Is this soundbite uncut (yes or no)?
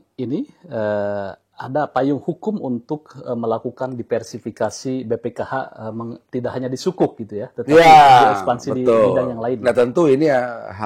yes